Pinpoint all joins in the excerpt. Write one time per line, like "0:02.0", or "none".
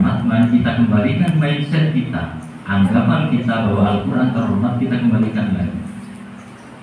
none